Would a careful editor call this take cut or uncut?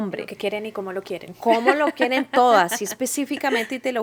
uncut